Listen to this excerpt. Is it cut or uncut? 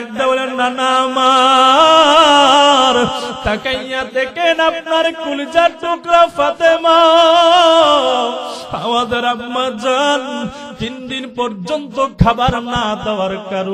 uncut